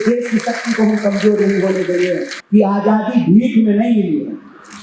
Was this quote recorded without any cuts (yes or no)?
no